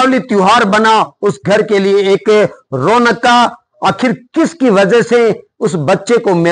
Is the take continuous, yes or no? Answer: yes